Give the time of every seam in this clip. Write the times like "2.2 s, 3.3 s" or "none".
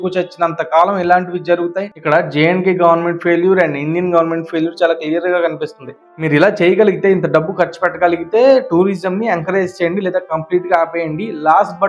1.9 s, 6.1 s